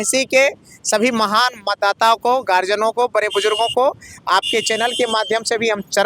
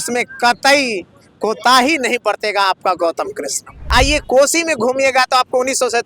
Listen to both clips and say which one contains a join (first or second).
second